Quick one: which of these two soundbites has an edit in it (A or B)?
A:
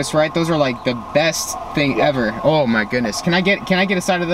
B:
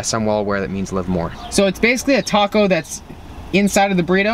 B